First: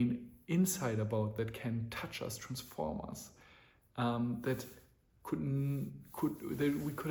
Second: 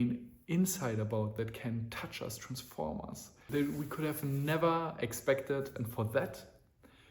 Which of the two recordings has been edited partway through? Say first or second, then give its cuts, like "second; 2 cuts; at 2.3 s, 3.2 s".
second; 2 cuts; at 3.5 s, 5.7 s